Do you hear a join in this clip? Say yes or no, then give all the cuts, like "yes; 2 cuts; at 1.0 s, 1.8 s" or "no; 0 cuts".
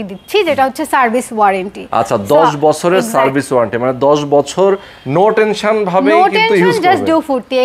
no; 0 cuts